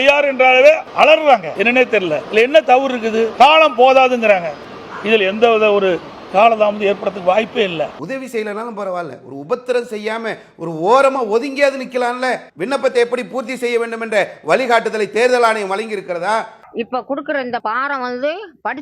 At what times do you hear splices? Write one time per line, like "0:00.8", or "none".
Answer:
0:01.9
0:03.3
0:12.5